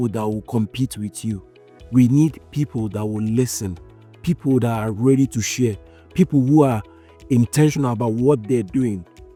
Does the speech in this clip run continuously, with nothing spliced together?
yes; 0 cuts

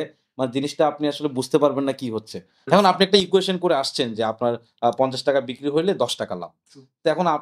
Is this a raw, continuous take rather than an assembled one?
no; 1 cut; at 2.7 s

